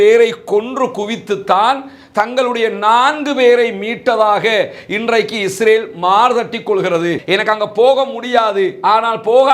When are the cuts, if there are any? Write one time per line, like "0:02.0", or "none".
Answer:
0:07.2